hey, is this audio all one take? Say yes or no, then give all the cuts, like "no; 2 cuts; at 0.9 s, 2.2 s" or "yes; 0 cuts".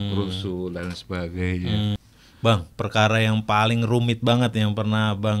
no; 1 cut; at 2.0 s